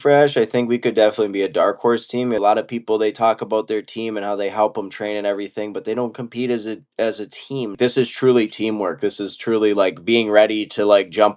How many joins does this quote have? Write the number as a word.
two